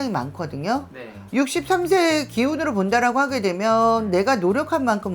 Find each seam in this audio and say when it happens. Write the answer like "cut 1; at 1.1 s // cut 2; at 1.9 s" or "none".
cut 1; at 1.1 s